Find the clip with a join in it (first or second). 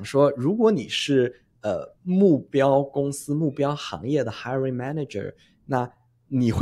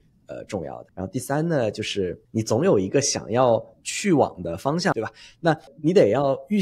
second